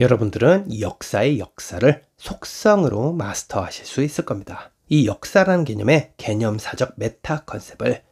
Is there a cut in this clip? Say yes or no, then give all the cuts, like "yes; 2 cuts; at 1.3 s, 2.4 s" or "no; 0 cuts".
no; 0 cuts